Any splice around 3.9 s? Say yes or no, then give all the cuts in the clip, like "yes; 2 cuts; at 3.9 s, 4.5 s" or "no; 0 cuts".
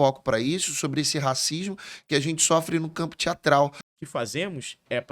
yes; 1 cut; at 3.9 s